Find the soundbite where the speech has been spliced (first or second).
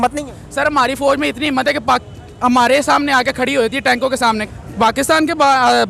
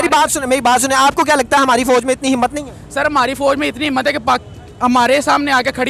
first